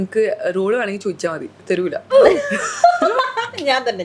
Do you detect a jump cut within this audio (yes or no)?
yes